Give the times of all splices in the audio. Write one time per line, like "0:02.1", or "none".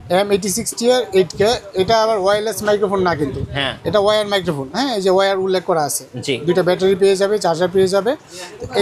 none